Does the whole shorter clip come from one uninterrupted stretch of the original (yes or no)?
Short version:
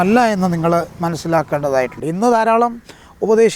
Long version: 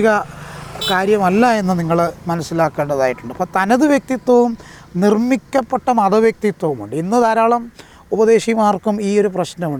no